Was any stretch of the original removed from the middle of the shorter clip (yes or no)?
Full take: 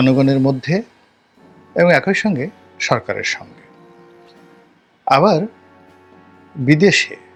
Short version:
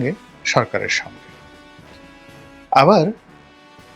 no